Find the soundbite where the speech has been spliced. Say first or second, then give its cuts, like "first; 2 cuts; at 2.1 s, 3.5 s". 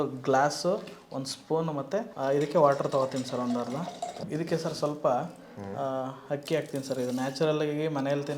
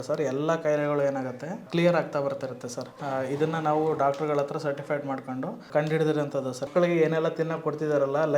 second; 3 cuts; at 2.9 s, 5.7 s, 6.7 s